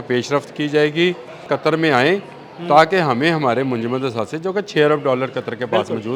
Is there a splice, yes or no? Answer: yes